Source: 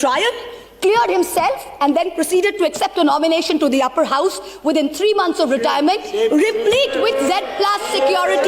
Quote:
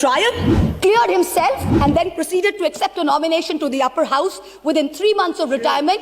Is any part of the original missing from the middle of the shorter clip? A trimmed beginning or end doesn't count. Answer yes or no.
no